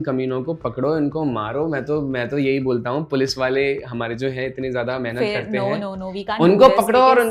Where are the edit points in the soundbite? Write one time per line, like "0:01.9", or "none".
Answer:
none